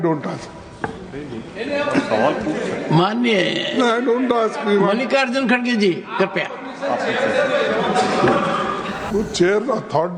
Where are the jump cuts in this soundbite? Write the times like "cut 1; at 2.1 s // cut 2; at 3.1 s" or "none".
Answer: cut 1; at 9.1 s